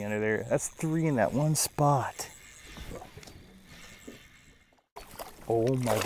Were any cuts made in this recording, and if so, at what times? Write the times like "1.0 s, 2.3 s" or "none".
4.8 s